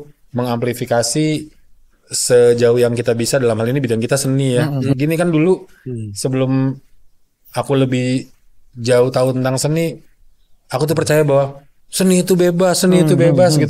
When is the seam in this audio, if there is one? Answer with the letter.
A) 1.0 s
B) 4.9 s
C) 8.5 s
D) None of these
B